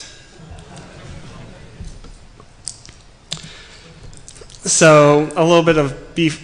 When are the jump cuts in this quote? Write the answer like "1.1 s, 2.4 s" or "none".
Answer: 5.1 s